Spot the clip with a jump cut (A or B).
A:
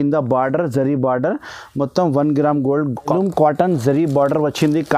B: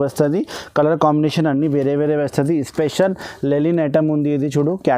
A